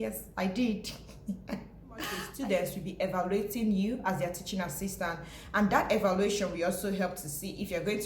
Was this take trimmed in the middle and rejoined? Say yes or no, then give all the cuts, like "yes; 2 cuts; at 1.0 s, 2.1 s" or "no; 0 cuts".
yes; 1 cut; at 2.1 s